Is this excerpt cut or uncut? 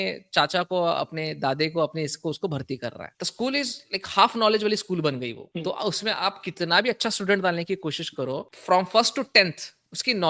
uncut